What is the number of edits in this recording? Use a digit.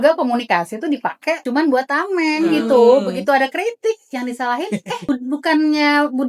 1